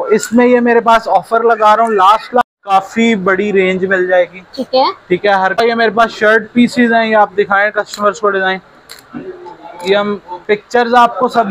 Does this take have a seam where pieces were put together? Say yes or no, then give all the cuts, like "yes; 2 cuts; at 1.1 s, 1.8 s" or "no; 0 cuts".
yes; 2 cuts; at 2.4 s, 5.5 s